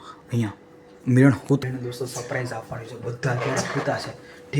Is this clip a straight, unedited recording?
no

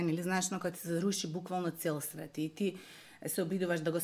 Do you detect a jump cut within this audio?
no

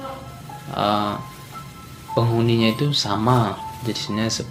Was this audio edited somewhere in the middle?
no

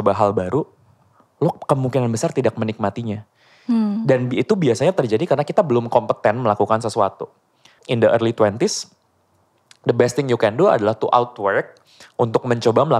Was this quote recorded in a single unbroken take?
no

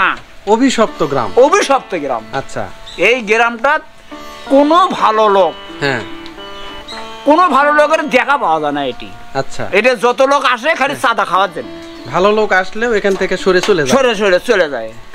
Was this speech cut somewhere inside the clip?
no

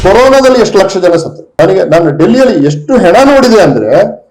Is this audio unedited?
no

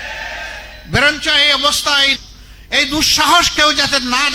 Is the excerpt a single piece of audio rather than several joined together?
no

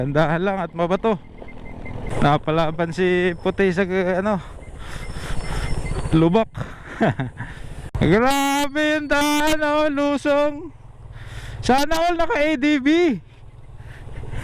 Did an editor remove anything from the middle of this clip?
yes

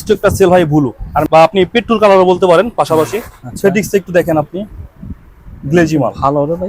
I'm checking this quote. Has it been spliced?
yes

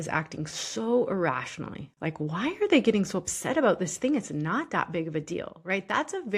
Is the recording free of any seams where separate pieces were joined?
yes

